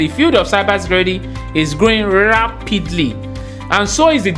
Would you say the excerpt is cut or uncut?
uncut